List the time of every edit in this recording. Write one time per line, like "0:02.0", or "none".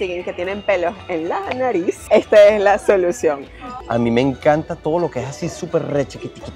0:02.0
0:03.7